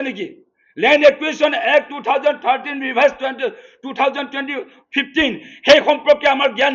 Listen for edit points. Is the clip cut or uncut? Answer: uncut